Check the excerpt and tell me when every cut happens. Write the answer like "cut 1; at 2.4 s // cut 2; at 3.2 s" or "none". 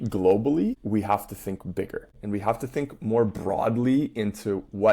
cut 1; at 0.8 s // cut 2; at 2.1 s

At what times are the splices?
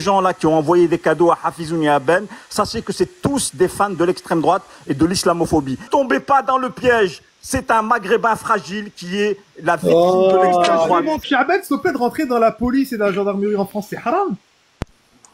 cut 1; at 5.9 s // cut 2; at 11.2 s

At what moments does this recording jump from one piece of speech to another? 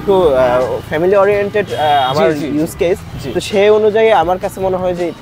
none

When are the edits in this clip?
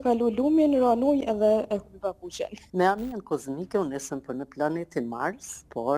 cut 1; at 2.6 s

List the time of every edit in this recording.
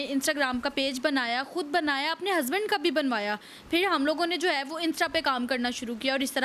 none

